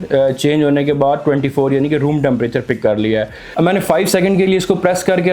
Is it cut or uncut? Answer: cut